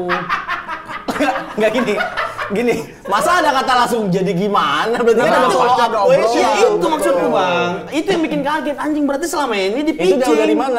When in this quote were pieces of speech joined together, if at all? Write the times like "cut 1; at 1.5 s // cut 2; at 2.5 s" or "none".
none